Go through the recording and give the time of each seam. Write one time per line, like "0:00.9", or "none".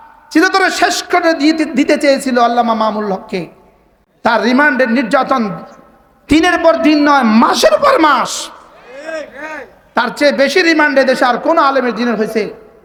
none